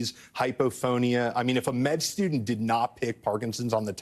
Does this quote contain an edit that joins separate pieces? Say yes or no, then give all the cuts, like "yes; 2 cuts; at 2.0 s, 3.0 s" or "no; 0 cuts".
no; 0 cuts